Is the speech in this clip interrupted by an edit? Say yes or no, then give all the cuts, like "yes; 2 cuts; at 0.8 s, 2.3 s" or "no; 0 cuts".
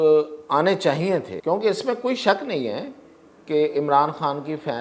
yes; 1 cut; at 1.3 s